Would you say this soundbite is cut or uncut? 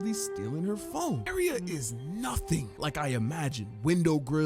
cut